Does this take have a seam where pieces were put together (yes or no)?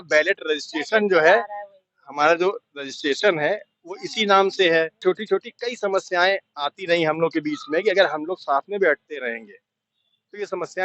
yes